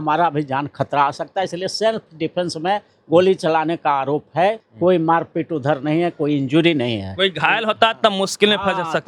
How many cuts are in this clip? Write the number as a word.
one